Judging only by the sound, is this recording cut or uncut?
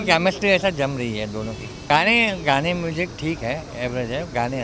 cut